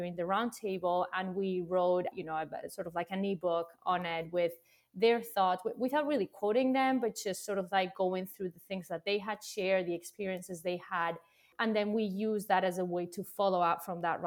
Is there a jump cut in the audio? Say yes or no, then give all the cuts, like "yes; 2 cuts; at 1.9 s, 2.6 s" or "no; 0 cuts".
yes; 1 cut; at 2.1 s